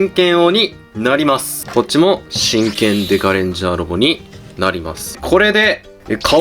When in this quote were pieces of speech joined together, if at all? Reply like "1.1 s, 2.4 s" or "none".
1.6 s, 5.2 s